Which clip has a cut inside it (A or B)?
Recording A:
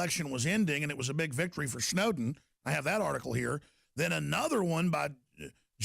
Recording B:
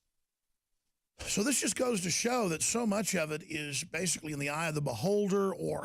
A